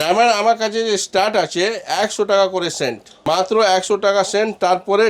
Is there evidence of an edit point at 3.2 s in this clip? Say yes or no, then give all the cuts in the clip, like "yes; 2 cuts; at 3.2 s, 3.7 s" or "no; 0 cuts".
yes; 1 cut; at 3.2 s